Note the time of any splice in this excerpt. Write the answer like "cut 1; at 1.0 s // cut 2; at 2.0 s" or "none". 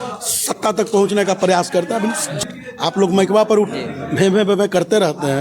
cut 1; at 2.4 s